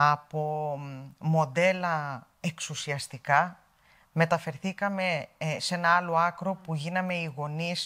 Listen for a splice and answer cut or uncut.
uncut